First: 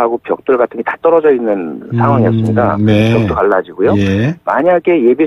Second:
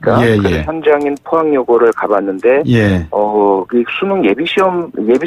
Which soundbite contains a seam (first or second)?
second